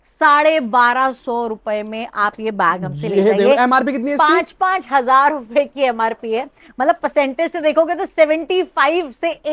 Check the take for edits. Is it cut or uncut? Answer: uncut